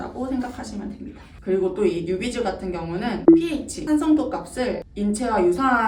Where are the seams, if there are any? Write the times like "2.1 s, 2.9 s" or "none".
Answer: none